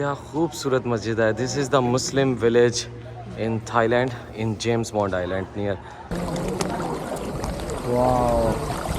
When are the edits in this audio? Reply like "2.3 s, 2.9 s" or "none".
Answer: 6.1 s